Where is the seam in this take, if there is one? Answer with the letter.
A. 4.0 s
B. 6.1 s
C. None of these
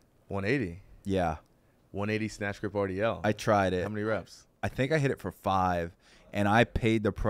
A